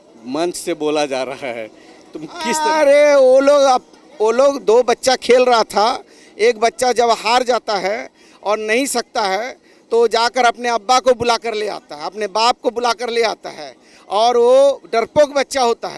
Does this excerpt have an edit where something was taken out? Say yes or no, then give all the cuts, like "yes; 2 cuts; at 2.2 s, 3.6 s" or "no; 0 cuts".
no; 0 cuts